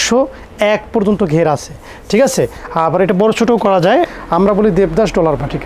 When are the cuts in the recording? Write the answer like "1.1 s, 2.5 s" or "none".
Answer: 4.1 s